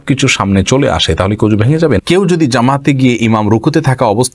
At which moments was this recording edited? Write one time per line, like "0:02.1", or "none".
0:02.0

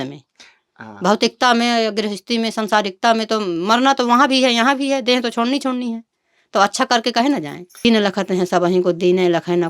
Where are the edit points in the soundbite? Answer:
0:07.8

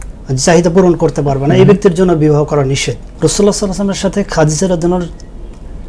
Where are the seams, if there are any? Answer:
0:03.1

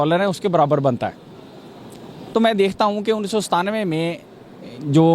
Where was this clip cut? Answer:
none

